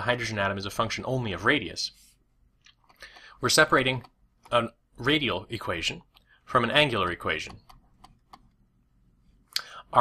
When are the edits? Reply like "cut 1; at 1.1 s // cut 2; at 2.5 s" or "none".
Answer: cut 1; at 8.6 s